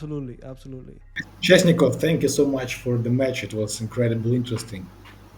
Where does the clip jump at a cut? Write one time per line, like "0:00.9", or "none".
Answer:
0:01.3